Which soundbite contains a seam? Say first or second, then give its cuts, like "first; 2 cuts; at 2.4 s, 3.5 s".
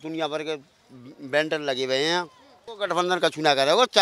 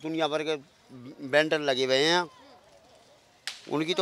first; 1 cut; at 2.6 s